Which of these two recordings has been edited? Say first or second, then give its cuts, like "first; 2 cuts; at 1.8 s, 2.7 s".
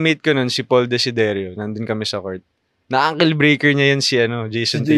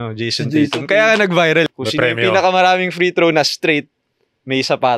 second; 1 cut; at 1.7 s